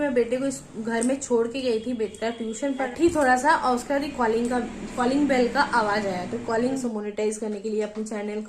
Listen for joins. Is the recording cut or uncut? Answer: cut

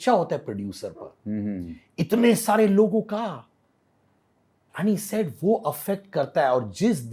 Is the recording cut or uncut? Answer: uncut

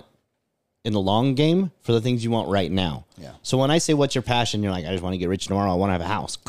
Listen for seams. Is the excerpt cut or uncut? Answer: uncut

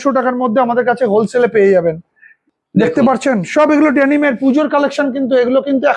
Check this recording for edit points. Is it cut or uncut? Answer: uncut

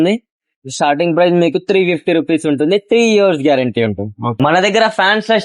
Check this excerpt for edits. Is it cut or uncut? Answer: cut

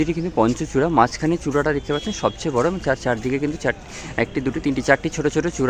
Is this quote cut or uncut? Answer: uncut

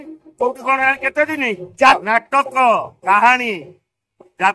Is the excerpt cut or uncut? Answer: cut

